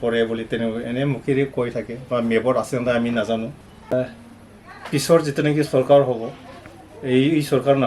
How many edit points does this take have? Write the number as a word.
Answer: one